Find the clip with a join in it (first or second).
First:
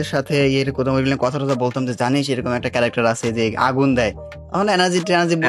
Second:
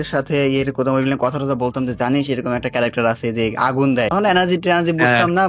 second